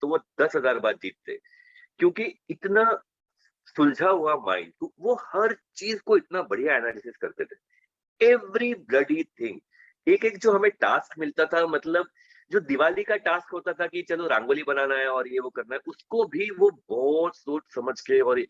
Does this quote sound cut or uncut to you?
uncut